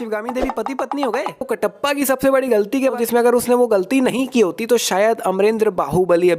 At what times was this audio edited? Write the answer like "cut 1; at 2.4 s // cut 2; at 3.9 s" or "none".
cut 1; at 1.5 s // cut 2; at 3.0 s